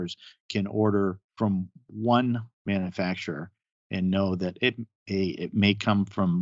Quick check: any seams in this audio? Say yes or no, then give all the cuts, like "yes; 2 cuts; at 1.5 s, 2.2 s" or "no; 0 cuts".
no; 0 cuts